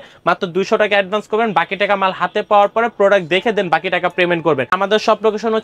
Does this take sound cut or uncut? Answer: cut